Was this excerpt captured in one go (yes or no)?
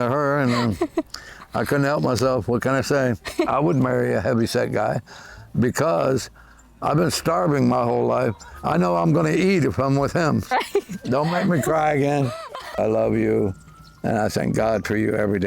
no